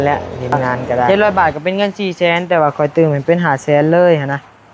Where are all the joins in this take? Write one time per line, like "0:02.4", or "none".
0:01.1